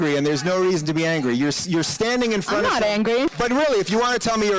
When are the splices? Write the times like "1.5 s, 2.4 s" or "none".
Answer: 3.3 s